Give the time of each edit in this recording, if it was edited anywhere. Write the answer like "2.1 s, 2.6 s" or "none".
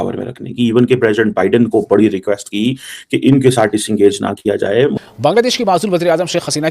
5.0 s